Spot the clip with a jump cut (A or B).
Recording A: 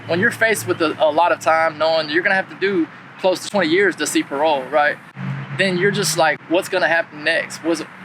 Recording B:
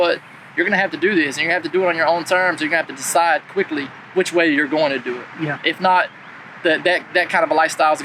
A